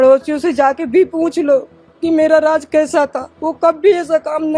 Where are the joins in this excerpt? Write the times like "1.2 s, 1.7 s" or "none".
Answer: none